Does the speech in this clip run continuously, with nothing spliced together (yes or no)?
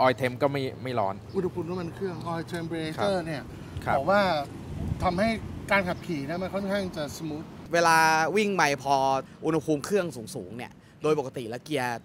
no